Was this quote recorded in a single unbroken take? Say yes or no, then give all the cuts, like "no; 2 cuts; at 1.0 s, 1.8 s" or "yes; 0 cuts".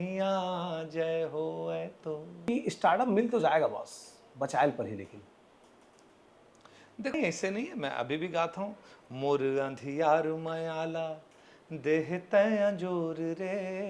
no; 2 cuts; at 2.3 s, 7.1 s